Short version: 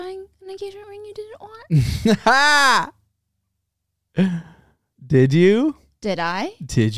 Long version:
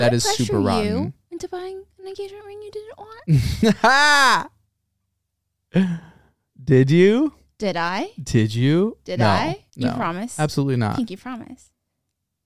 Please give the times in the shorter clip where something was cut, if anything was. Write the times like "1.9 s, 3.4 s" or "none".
none